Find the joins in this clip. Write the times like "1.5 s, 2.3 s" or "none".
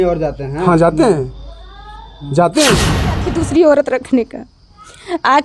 3.3 s